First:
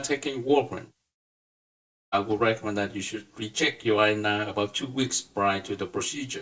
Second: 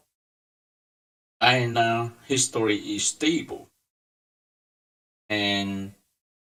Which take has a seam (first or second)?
first